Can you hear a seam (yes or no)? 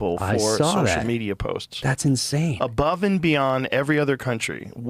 no